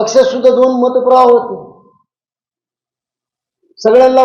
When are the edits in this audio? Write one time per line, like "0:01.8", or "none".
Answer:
none